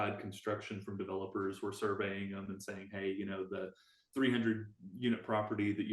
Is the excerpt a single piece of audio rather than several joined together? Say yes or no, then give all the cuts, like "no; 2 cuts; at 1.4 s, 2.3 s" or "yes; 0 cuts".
yes; 0 cuts